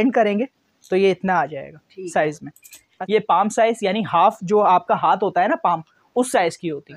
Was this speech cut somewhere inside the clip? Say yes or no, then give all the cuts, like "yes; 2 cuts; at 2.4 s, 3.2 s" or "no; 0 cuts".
yes; 1 cut; at 2.9 s